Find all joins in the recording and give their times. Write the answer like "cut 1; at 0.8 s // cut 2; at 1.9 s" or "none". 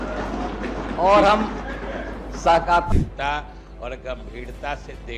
cut 1; at 2.9 s